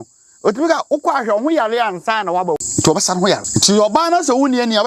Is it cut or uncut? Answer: cut